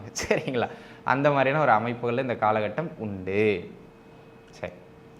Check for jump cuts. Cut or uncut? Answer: uncut